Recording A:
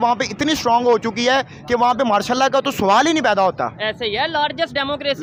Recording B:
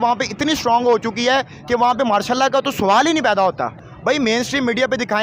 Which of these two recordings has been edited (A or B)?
B